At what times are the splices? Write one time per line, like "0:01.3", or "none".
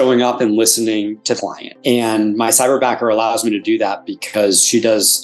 0:01.4